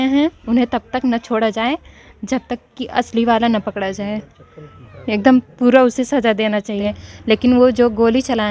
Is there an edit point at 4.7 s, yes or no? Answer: no